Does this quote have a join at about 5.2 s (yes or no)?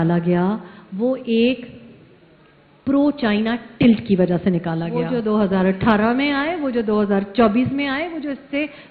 yes